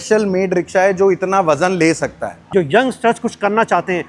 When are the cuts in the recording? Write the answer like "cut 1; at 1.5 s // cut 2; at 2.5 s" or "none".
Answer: cut 1; at 2.4 s